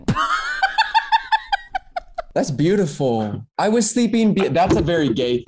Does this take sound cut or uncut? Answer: cut